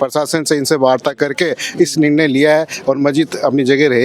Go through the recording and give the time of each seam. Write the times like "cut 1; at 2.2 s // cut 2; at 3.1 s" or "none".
none